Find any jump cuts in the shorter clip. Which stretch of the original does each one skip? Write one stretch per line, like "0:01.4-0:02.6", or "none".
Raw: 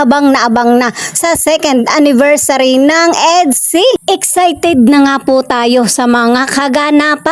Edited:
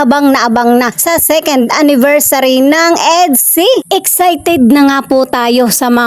0:01.0-0:01.1